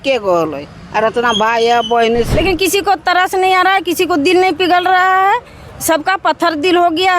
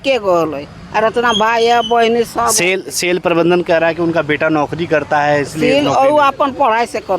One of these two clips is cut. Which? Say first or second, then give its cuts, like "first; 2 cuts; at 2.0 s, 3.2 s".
first; 1 cut; at 2.3 s